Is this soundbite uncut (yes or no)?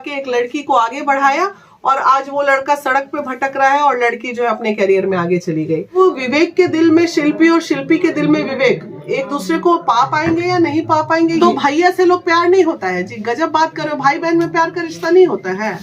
no